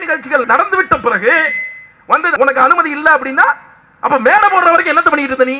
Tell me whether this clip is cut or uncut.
cut